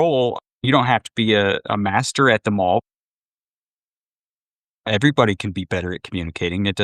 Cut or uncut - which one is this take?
uncut